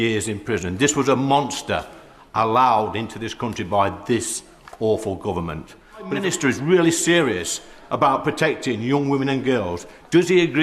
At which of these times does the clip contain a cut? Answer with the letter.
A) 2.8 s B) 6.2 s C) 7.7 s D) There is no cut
B